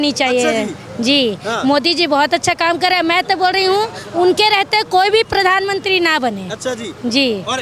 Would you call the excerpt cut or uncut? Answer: uncut